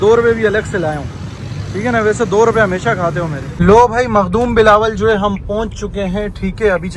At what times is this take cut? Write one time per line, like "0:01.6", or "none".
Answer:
0:03.5